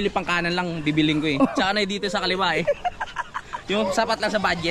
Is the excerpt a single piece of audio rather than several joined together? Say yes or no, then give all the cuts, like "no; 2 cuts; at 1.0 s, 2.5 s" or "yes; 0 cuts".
yes; 0 cuts